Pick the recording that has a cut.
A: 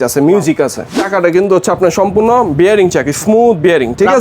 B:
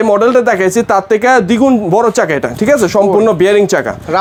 A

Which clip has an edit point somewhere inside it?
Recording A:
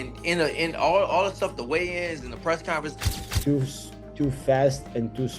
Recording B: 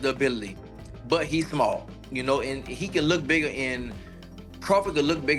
A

